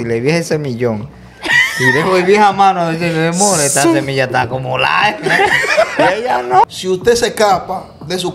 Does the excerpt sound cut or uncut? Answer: cut